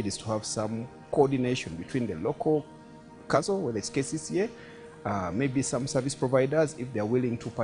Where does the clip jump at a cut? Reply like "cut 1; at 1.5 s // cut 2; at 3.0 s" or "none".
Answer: cut 1; at 3.3 s

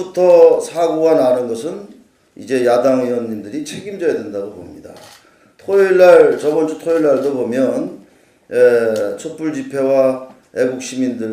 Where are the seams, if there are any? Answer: cut 1; at 7.4 s

